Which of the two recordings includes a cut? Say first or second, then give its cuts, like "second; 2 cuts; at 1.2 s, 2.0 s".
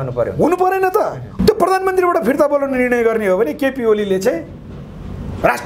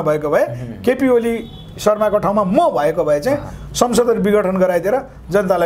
first; 1 cut; at 1.3 s